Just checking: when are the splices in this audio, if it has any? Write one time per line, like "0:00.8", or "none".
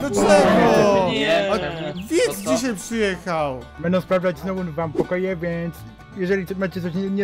none